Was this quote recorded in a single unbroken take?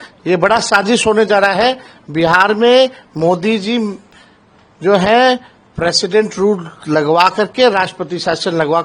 yes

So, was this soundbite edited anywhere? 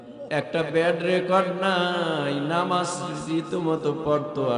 no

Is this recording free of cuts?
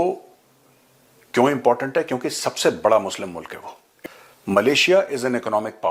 no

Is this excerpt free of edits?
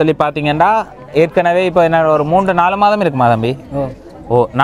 yes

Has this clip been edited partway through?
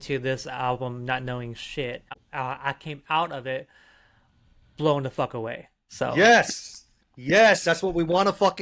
yes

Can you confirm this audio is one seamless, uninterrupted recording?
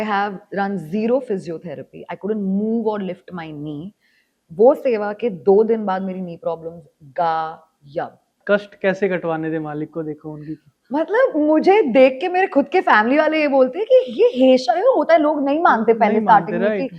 yes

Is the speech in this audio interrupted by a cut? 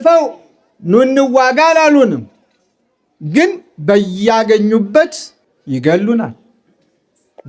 no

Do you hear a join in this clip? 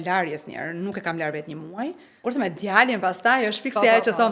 yes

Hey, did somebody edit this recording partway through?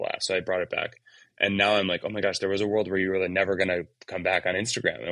no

